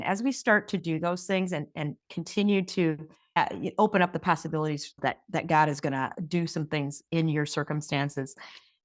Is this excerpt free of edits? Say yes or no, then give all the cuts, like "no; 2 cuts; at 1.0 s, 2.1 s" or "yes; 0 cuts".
no; 1 cut; at 3.4 s